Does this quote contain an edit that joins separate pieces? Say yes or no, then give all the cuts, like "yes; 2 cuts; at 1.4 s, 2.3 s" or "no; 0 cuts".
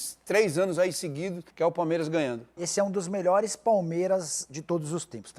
yes; 2 cuts; at 1.4 s, 2.6 s